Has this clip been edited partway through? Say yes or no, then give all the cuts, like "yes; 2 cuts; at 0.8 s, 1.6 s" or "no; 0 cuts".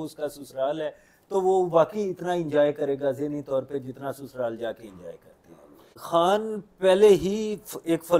yes; 1 cut; at 6.0 s